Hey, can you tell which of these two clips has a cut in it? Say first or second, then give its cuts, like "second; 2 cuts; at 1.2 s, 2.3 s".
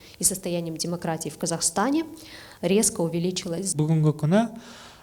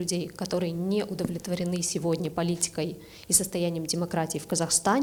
first; 1 cut; at 3.7 s